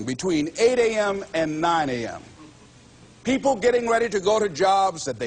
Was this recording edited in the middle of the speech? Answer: no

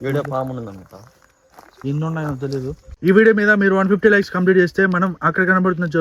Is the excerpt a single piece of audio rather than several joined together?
no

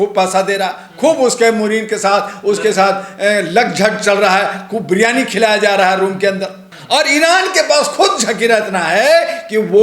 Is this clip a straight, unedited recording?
no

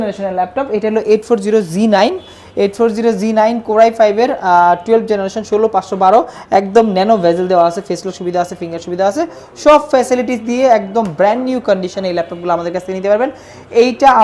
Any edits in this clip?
no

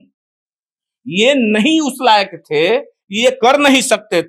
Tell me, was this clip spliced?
no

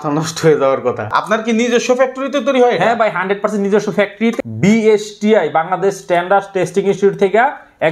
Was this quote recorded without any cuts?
no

